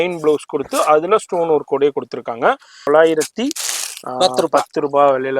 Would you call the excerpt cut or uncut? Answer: cut